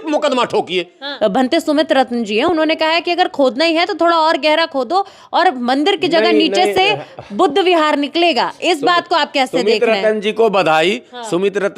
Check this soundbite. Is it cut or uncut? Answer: cut